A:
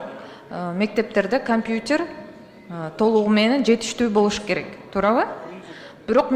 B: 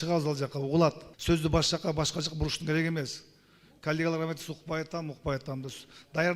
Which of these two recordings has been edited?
B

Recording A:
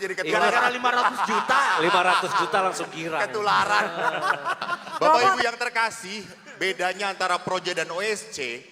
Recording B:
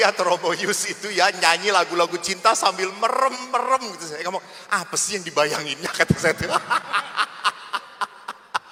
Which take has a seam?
A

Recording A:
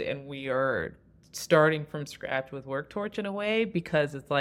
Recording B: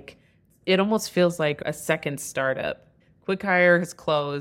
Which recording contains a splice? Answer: B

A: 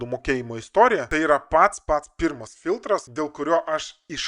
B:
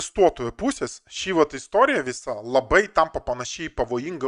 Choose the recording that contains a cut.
A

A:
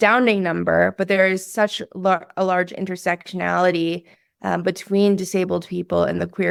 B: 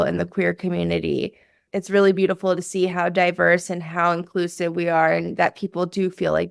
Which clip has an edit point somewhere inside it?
B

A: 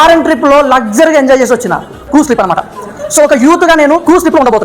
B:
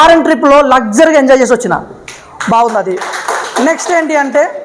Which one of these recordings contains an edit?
A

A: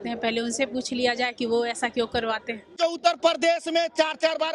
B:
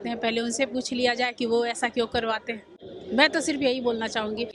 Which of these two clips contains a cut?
A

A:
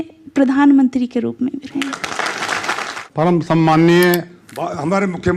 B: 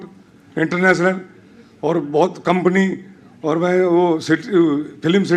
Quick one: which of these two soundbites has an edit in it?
A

